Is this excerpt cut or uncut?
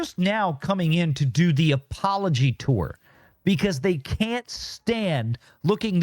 uncut